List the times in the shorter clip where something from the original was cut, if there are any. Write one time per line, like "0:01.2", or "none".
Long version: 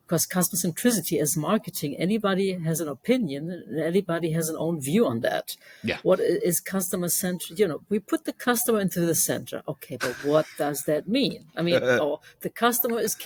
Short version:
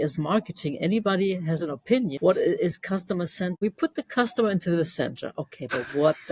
0:02.2
0:03.6